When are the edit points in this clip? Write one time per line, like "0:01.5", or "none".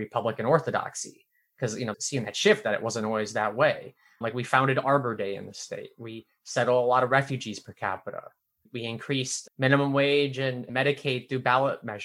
none